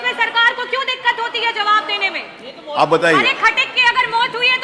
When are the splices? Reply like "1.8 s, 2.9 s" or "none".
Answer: none